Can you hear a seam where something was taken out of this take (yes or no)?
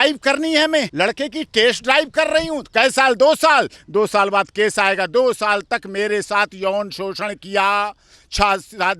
yes